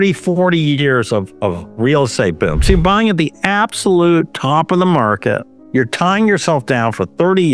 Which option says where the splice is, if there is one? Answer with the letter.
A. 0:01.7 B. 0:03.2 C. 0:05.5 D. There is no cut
C